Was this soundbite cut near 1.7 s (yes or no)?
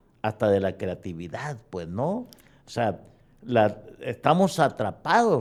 no